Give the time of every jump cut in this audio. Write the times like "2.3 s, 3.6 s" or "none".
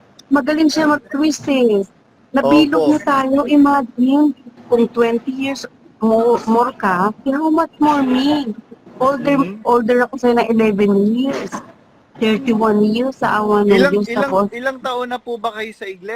none